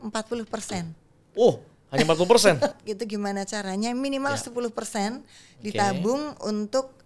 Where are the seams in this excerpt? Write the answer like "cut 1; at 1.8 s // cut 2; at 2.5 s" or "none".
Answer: cut 1; at 2.7 s

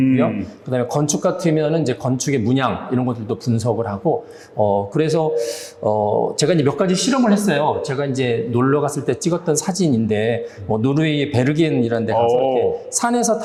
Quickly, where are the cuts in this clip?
none

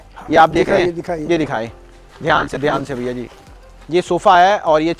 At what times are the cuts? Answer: none

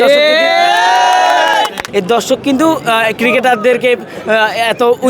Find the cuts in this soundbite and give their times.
cut 1; at 1.8 s

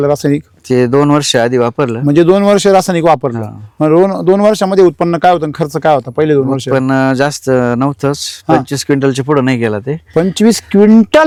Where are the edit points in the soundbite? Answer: none

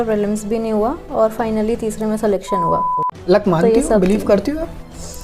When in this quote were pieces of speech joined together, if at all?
cut 1; at 2.9 s

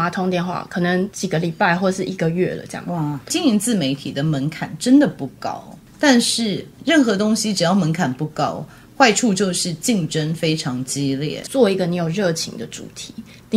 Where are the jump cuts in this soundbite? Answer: cut 1; at 1.2 s // cut 2; at 3.3 s // cut 3; at 11.4 s

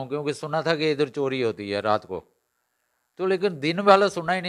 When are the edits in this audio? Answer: none

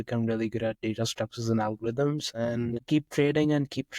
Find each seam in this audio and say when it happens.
cut 1; at 2.8 s

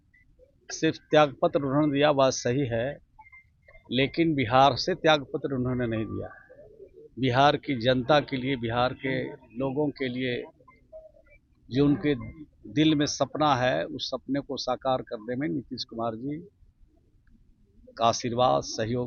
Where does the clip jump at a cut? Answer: none

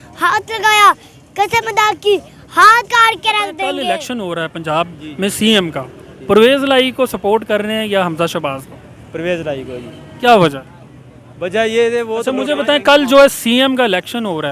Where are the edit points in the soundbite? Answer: cut 1; at 3.8 s // cut 2; at 12.4 s

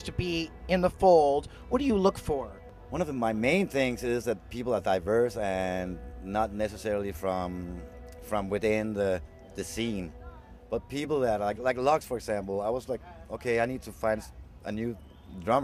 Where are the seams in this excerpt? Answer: none

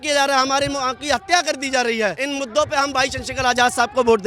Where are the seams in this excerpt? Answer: cut 1; at 2.2 s

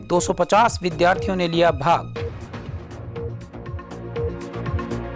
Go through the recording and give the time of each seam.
none

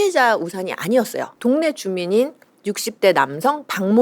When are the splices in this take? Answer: cut 1; at 1.3 s

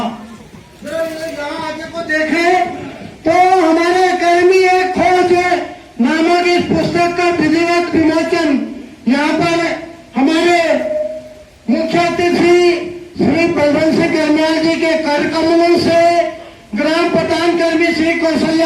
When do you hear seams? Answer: none

